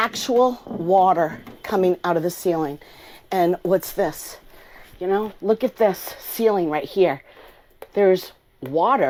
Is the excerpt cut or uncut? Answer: uncut